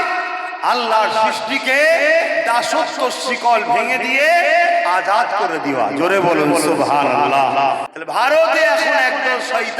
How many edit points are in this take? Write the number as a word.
one